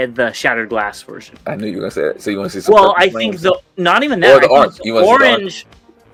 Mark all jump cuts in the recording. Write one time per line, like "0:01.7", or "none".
none